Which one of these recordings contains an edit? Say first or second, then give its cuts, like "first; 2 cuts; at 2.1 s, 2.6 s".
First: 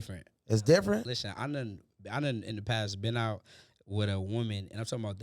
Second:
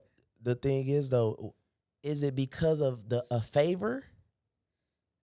first; 1 cut; at 1.0 s